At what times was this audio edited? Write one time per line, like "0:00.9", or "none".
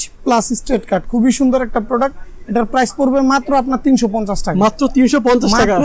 none